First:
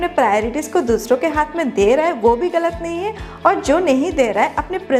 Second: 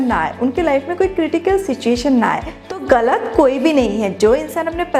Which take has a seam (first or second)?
second